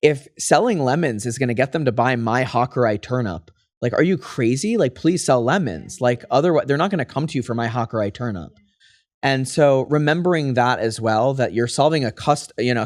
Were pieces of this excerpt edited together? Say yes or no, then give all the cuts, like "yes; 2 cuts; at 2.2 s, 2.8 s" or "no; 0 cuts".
no; 0 cuts